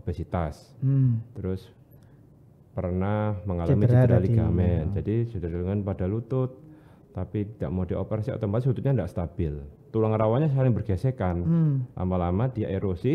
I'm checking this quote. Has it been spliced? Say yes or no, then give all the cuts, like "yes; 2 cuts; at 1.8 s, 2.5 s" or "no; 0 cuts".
no; 0 cuts